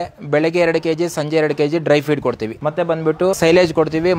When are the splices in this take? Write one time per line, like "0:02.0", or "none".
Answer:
0:02.6
0:03.4